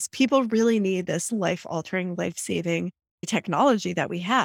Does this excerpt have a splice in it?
yes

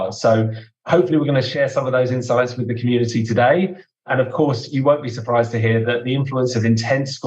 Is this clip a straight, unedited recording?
no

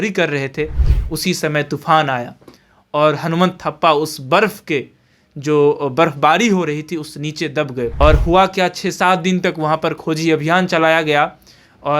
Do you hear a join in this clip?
yes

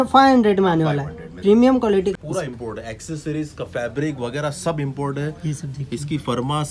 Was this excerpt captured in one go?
no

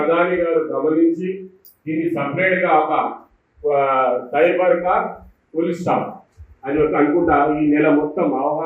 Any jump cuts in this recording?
yes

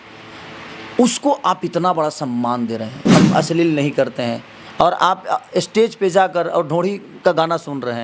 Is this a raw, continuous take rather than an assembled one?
no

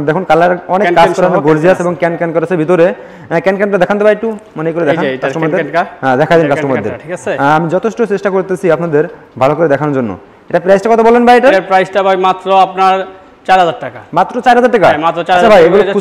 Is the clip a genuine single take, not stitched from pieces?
yes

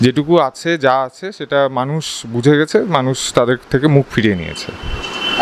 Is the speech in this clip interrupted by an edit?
no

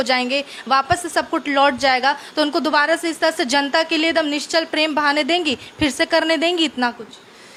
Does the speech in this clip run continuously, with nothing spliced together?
yes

